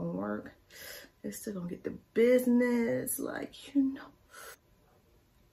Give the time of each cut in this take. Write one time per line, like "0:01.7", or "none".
0:04.5